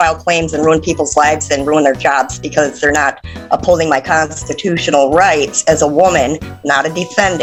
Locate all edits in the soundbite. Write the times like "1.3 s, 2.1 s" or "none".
none